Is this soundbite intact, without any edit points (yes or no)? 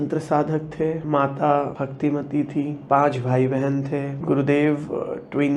no